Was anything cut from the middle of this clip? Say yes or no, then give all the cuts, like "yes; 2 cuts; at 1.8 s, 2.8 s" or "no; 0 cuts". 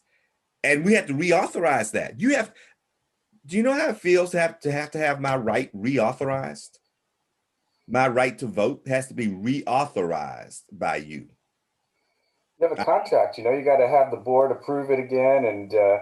no; 0 cuts